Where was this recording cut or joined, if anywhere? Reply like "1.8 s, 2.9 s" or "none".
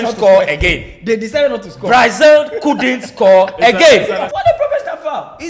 4.3 s